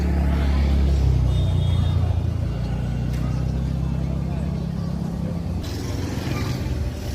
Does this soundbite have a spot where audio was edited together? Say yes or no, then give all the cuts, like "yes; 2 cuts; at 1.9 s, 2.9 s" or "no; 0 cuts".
yes; 1 cut; at 5.6 s